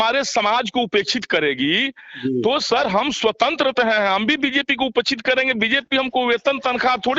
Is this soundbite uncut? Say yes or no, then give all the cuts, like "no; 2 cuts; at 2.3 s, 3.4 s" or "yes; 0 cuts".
yes; 0 cuts